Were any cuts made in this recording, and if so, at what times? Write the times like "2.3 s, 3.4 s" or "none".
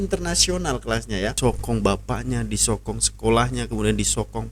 1.4 s